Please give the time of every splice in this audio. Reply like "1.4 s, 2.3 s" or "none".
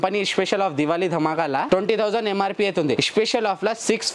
none